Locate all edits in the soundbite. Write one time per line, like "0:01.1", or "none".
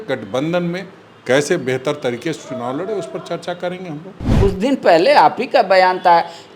0:04.3

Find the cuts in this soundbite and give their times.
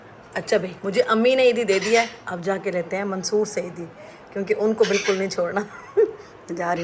none

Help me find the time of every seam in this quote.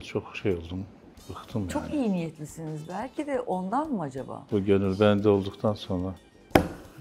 0:04.3

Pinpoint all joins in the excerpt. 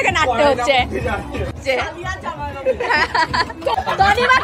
0:01.6
0:03.7

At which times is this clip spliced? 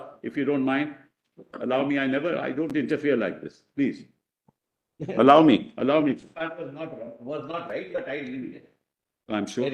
none

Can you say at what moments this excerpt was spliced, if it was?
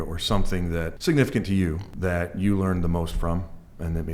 0:00.9
0:01.9

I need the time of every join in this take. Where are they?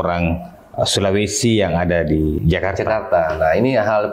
0:02.4

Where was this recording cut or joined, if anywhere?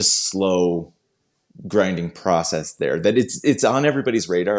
none

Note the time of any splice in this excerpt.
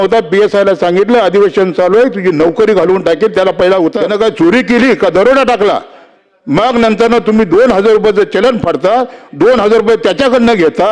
0:04.0

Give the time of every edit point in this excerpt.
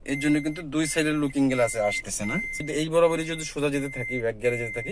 0:02.6

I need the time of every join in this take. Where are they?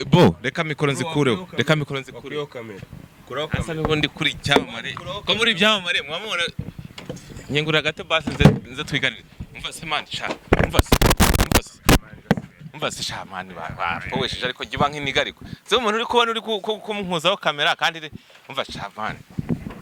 none

